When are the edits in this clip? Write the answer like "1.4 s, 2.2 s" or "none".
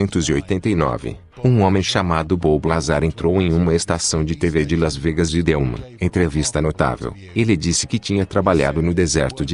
5.8 s